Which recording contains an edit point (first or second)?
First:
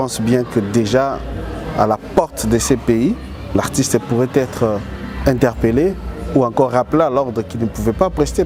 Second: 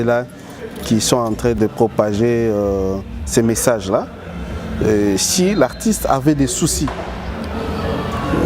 second